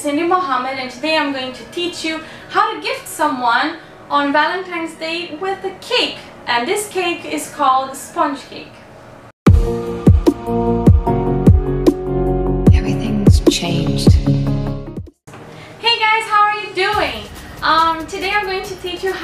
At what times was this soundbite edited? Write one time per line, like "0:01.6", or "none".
none